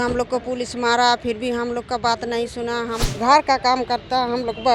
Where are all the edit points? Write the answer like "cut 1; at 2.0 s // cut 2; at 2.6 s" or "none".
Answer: cut 1; at 3.1 s